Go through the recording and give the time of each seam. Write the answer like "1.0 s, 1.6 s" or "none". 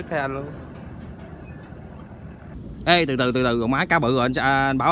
2.5 s